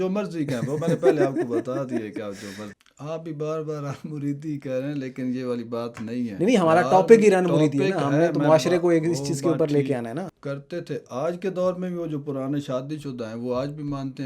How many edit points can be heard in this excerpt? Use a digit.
2